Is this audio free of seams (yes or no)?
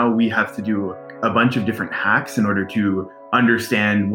no